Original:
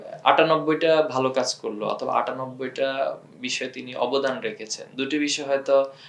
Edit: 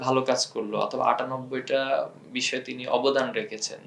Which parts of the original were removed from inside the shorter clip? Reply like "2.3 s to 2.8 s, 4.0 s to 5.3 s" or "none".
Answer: none

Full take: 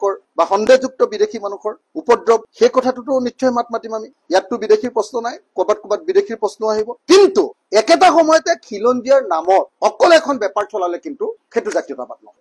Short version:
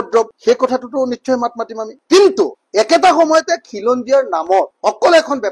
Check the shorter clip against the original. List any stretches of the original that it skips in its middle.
4.1 s to 6.9 s

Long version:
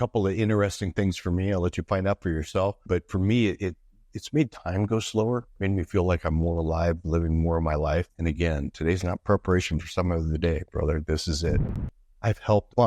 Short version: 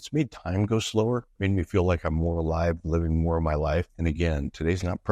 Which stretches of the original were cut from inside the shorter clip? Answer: none

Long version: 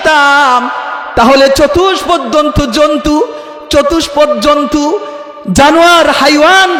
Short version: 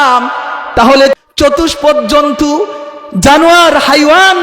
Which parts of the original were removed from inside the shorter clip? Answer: 1.6 s to 3.5 s

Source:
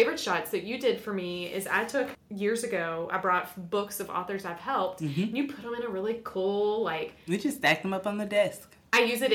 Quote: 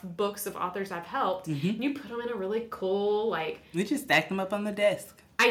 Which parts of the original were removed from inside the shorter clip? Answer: none

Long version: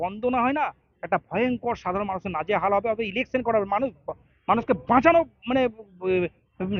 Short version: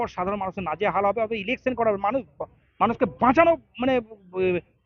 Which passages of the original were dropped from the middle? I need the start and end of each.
none

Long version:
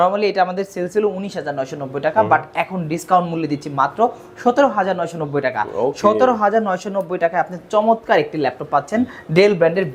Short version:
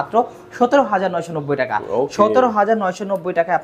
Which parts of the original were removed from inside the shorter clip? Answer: none

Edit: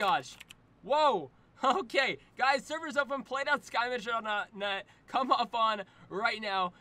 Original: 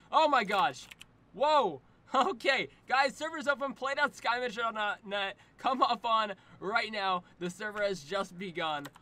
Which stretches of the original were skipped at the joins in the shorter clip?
none

